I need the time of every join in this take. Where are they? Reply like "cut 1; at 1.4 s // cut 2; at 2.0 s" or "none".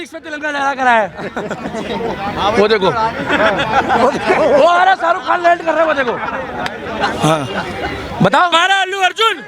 cut 1; at 8.5 s